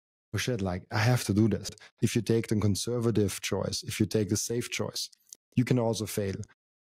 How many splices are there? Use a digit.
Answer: 1